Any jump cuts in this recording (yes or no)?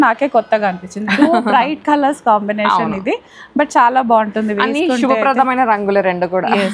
no